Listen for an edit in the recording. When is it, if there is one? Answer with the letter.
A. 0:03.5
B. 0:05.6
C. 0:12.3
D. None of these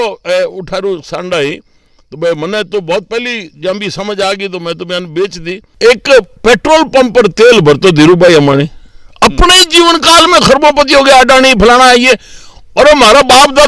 B